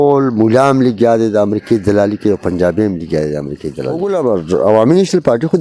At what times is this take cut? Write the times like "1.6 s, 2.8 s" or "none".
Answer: 4.0 s